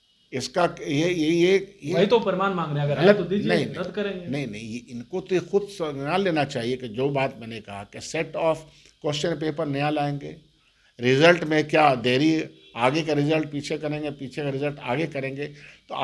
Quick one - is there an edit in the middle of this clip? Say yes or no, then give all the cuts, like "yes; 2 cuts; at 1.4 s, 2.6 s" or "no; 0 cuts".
no; 0 cuts